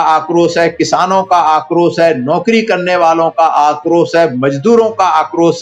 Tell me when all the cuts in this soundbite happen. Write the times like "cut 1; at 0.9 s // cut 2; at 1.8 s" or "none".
none